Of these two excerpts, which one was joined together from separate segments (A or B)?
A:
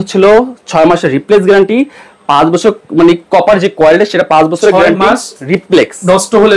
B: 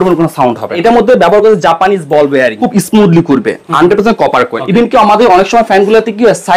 B